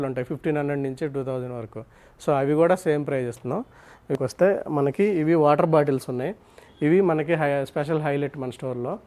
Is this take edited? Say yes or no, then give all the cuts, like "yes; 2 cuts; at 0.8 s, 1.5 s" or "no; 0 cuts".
yes; 1 cut; at 4.1 s